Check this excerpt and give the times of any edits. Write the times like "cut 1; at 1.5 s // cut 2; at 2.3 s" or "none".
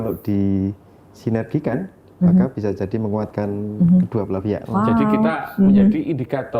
cut 1; at 4.6 s